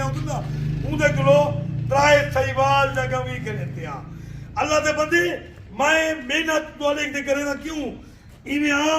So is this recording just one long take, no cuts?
yes; 0 cuts

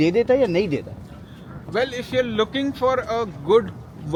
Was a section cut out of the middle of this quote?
no; 0 cuts

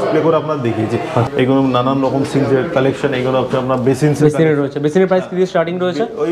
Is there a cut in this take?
yes; 1 cut; at 1.3 s

